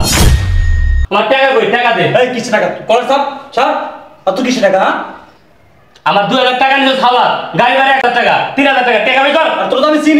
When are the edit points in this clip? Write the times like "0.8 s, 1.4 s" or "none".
8.0 s